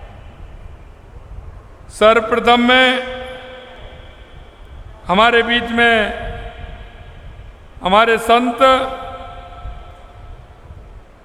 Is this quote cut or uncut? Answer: uncut